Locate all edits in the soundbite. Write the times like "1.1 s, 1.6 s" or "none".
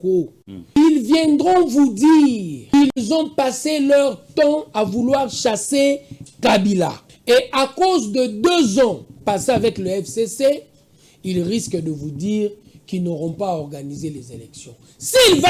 0.8 s, 2.6 s, 7.1 s